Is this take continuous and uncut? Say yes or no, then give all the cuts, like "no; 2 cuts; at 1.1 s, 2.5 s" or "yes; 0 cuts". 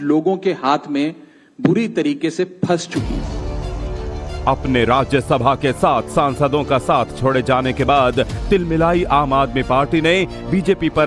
yes; 0 cuts